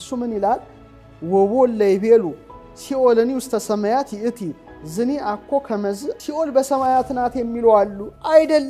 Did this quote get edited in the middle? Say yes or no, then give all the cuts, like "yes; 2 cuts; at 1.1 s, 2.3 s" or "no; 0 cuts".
no; 0 cuts